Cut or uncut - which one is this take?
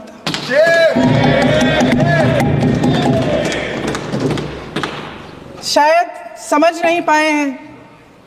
uncut